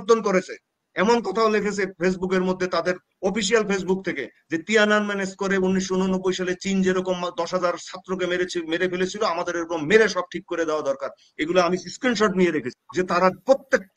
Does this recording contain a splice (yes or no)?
yes